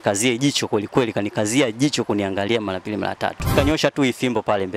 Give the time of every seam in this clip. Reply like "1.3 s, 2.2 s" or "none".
3.5 s